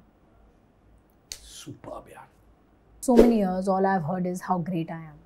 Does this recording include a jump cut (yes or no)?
yes